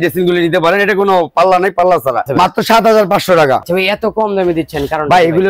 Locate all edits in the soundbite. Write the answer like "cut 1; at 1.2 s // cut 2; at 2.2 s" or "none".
cut 1; at 2.3 s // cut 2; at 3.6 s